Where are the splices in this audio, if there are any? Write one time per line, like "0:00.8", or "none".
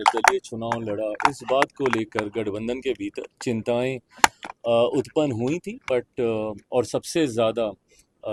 none

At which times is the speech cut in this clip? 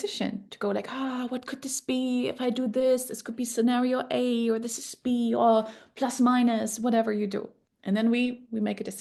none

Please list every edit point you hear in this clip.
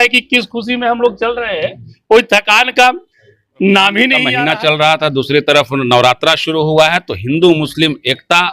0:04.3

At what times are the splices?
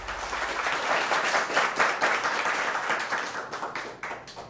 0:01.6

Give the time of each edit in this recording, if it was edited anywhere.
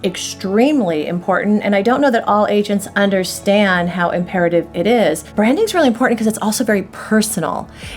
0:05.3

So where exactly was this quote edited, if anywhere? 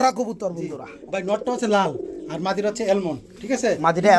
none

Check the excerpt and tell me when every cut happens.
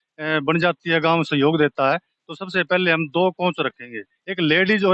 none

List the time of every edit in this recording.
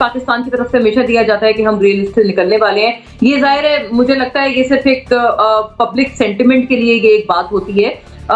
none

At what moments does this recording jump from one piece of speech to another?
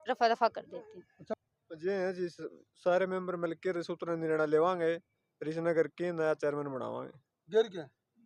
0:01.2

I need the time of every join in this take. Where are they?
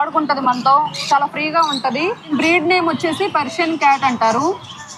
0:02.3

